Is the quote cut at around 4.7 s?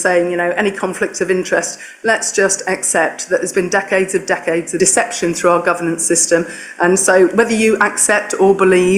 yes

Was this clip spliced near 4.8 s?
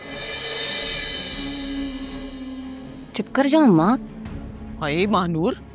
no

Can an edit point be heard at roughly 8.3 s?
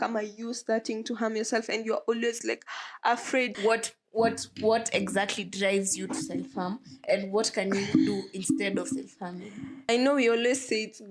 no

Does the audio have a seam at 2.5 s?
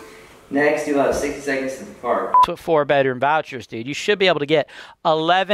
yes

